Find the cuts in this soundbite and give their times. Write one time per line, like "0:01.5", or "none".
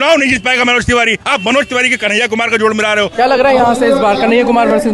0:03.1